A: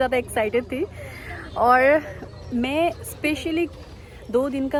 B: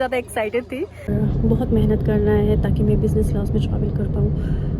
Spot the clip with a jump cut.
B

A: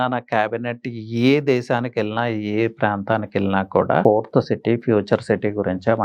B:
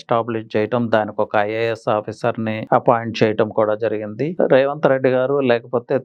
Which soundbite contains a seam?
A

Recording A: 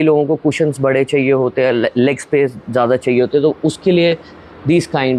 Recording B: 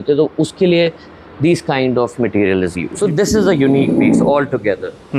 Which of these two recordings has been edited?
B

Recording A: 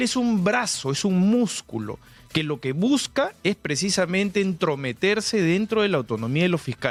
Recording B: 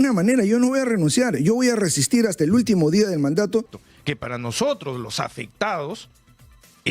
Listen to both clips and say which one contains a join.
B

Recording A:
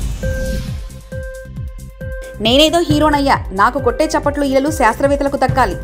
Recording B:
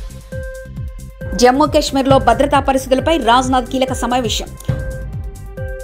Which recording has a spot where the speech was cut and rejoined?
A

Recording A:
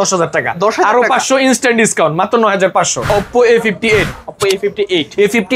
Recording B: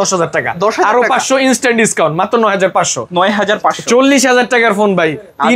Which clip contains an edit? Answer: A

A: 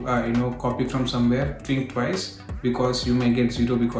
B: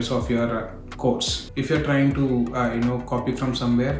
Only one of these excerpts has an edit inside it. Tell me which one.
B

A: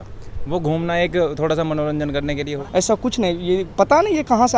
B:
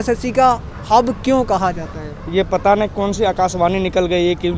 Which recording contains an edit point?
A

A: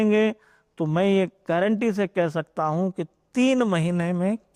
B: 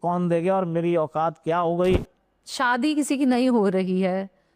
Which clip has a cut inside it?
B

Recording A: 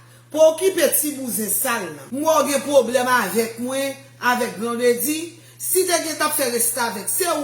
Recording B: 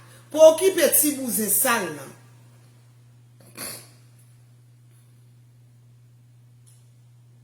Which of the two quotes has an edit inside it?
A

